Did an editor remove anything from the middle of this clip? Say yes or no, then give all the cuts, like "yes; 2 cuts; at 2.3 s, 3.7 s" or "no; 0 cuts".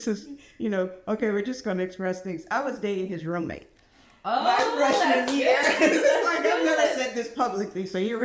no; 0 cuts